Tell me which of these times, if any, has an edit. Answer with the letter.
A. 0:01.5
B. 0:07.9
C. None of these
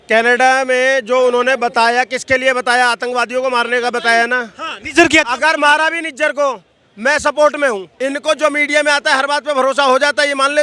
B